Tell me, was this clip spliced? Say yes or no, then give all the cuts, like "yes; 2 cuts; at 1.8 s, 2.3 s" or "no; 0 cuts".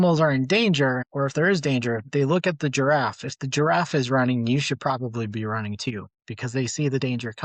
no; 0 cuts